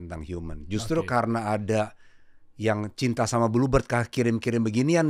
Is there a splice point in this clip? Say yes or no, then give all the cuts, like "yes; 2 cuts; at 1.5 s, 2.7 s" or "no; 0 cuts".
no; 0 cuts